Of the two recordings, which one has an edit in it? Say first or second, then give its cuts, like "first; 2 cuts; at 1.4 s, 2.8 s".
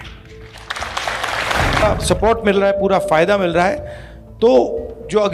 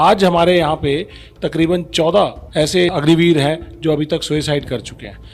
first; 1 cut; at 1.8 s